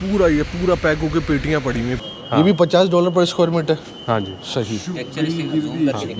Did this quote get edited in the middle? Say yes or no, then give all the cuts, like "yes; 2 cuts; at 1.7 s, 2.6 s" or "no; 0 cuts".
yes; 1 cut; at 2.1 s